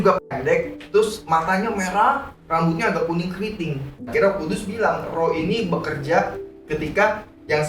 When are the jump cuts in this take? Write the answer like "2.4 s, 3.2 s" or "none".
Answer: 4.0 s